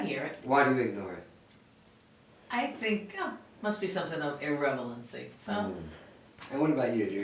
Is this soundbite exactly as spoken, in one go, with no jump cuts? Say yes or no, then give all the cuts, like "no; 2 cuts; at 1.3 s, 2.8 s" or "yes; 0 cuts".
yes; 0 cuts